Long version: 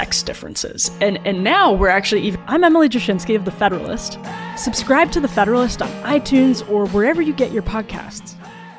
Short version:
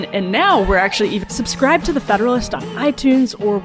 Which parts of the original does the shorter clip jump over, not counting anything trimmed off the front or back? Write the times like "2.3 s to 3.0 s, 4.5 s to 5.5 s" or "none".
2.4 s to 4.5 s